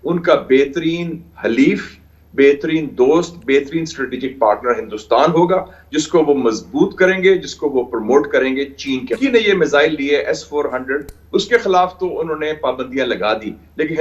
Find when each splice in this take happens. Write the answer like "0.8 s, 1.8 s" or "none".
9.2 s